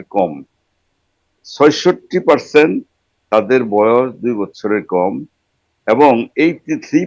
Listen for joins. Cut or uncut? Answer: uncut